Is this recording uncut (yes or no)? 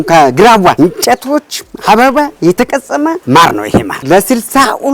no